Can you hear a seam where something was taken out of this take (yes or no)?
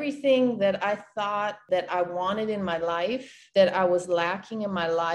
yes